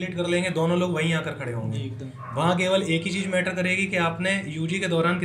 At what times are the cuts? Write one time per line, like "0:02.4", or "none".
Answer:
none